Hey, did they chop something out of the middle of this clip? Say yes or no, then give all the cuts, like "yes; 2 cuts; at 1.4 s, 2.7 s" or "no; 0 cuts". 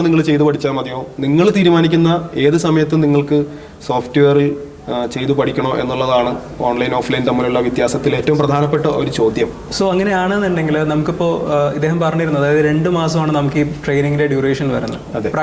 no; 0 cuts